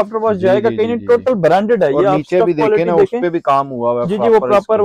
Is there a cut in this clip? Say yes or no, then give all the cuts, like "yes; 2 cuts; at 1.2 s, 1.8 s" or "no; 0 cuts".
no; 0 cuts